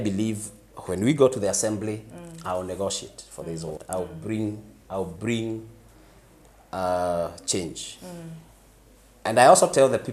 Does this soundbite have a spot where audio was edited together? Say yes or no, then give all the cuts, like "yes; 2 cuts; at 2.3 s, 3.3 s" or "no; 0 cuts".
no; 0 cuts